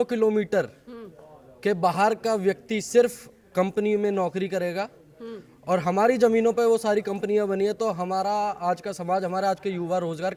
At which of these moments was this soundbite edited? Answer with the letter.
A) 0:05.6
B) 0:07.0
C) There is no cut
C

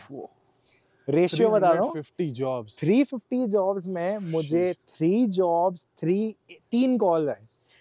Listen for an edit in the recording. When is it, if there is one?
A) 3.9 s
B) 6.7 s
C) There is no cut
C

